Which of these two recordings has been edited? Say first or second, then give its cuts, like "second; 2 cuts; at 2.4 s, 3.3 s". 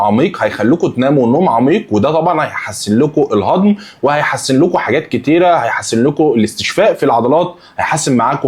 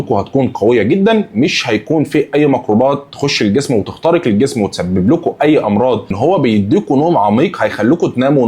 second; 1 cut; at 6.2 s